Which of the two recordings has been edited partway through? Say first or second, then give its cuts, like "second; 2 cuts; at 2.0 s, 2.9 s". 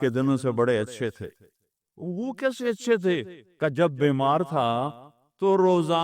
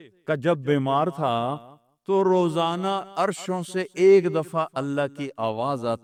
first; 1 cut; at 2.0 s